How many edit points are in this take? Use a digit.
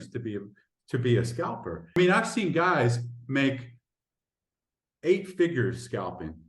1